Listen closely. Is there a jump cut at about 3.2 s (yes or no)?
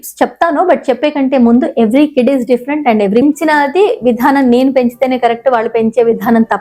yes